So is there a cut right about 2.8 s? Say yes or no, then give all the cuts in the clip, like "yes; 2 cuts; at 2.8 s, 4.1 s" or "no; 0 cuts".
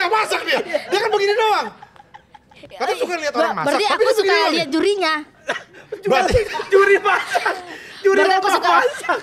no; 0 cuts